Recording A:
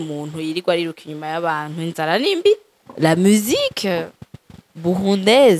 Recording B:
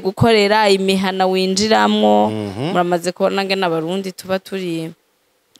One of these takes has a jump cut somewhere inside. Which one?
A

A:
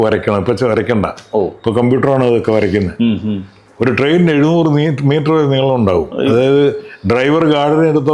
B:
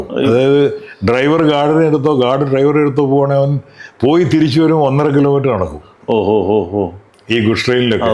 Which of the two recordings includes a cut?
A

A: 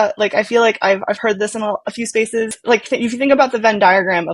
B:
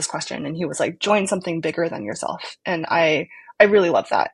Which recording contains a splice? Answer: A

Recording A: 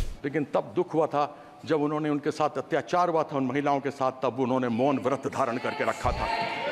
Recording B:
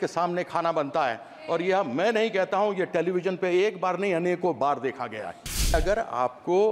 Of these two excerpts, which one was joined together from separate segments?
B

